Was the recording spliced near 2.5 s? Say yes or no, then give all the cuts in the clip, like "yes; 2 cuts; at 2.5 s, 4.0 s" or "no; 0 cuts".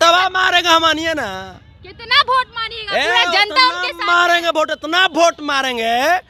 no; 0 cuts